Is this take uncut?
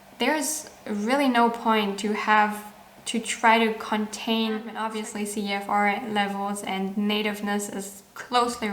no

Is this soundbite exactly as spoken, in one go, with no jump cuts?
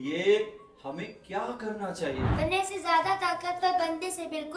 no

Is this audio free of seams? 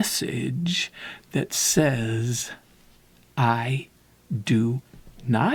yes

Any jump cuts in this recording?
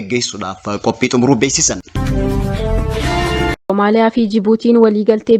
yes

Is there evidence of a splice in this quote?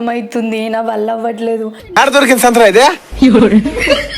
yes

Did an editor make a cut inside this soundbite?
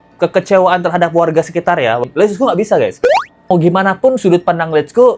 yes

